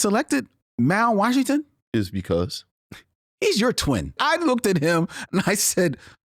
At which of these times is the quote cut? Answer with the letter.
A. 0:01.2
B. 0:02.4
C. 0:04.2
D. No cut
C